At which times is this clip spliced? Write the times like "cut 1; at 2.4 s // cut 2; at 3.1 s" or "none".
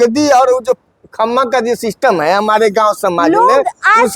none